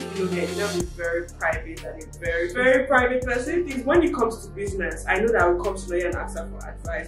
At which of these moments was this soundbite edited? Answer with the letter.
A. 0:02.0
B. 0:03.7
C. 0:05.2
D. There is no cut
B